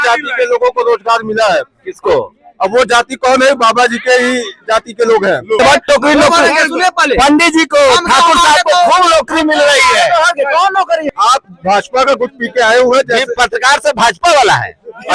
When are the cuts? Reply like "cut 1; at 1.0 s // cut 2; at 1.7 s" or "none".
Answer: cut 1; at 5.6 s // cut 2; at 11.1 s

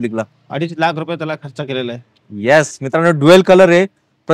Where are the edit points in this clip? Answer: none

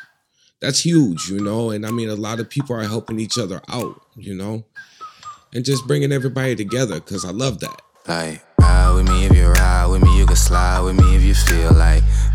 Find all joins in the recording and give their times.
cut 1; at 7.9 s

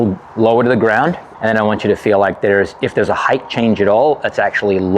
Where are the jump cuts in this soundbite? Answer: cut 1; at 1.3 s

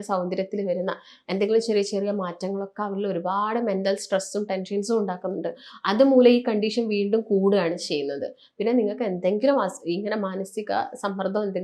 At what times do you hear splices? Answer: none

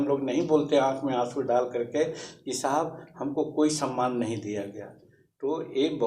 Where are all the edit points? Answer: none

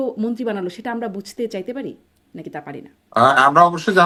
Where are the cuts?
none

